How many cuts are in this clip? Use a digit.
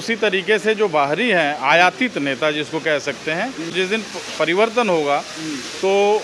1